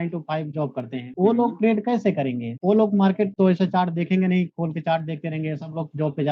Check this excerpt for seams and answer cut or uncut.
cut